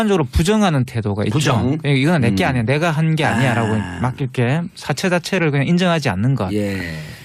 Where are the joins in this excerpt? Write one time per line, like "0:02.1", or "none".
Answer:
none